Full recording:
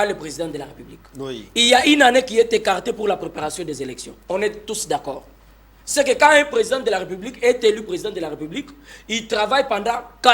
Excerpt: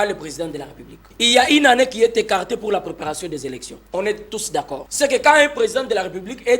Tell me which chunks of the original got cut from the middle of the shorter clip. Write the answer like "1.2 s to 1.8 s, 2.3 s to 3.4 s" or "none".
1.1 s to 1.4 s, 5.2 s to 5.8 s